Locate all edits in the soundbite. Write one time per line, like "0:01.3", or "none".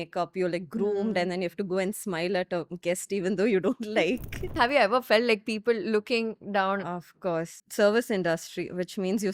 0:04.5